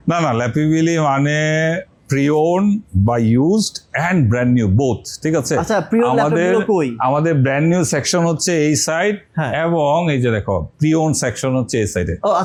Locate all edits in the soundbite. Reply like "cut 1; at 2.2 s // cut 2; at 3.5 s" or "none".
none